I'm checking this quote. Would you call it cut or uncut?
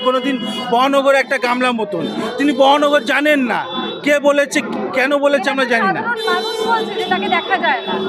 uncut